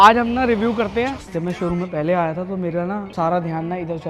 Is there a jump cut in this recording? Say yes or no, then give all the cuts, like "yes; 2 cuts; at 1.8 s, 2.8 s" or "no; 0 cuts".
yes; 2 cuts; at 1.3 s, 3.1 s